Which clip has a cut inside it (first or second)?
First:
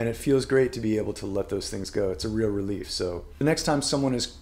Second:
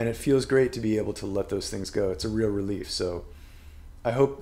first